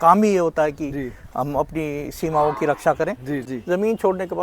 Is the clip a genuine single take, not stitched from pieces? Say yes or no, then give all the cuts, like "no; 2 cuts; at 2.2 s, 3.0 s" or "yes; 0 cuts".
no; 1 cut; at 3.5 s